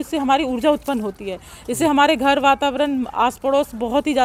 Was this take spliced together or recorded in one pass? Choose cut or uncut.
uncut